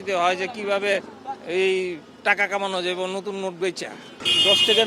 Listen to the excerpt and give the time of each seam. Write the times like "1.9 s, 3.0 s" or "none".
none